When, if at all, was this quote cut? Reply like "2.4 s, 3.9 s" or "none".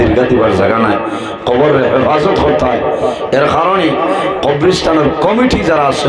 none